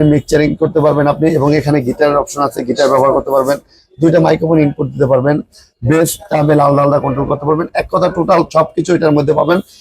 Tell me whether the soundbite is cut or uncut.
uncut